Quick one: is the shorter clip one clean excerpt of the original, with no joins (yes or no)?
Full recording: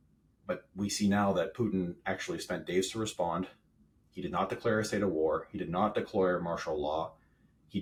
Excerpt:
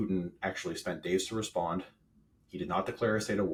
yes